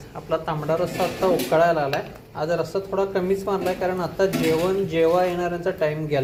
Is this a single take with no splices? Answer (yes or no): yes